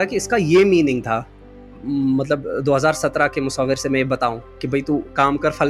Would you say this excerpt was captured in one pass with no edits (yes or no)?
no